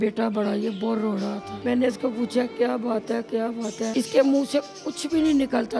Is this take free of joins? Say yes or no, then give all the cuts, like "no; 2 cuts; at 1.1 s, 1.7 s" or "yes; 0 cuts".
no; 2 cuts; at 1.5 s, 3.9 s